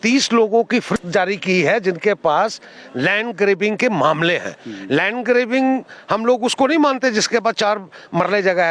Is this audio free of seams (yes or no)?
no